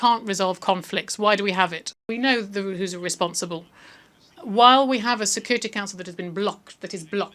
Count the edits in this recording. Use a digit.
1